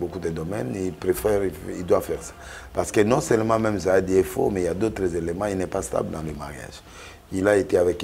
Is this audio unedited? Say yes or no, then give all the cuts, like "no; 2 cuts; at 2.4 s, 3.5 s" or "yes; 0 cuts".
yes; 0 cuts